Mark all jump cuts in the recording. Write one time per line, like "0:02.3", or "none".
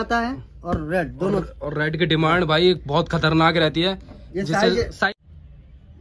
0:05.1